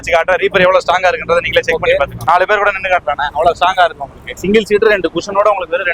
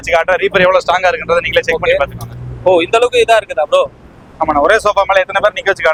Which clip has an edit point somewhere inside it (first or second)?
first